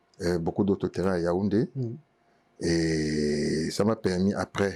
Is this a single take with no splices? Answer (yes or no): yes